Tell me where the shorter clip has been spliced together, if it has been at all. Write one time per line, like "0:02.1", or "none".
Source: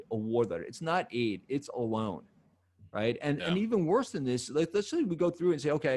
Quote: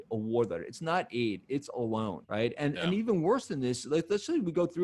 0:02.2